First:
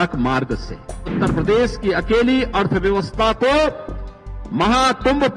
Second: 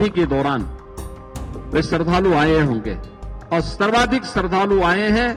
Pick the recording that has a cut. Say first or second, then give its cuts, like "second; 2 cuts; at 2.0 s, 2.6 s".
first; 1 cut; at 1.1 s